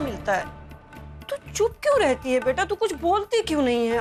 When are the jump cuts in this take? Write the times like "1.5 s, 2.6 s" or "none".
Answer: none